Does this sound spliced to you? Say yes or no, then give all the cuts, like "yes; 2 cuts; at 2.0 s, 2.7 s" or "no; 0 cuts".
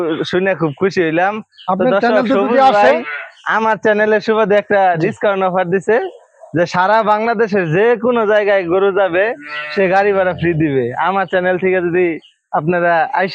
no; 0 cuts